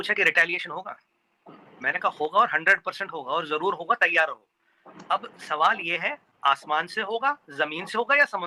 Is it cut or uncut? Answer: uncut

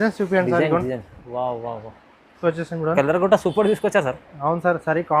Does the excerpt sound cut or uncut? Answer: cut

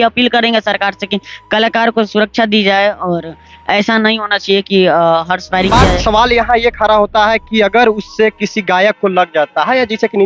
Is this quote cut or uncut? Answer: cut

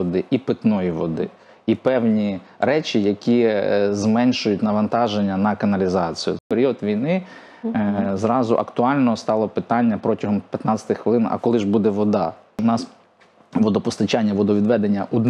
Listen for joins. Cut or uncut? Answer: cut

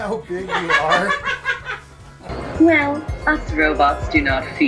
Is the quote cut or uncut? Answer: cut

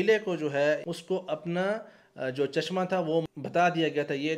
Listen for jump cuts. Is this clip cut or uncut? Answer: cut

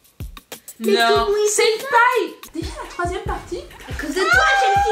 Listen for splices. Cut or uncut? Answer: cut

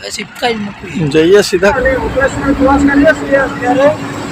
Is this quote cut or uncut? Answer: cut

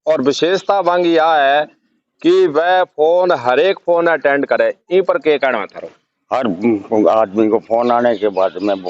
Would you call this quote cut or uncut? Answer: uncut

